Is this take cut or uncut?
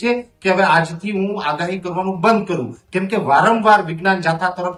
uncut